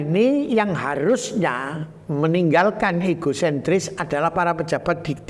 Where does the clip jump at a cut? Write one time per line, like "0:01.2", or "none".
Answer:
none